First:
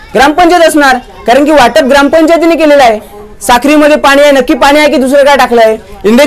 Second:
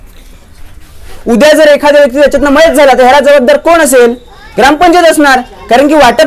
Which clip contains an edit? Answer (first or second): second